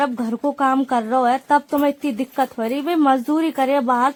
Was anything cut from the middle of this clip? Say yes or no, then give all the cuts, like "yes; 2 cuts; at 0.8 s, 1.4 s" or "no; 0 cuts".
no; 0 cuts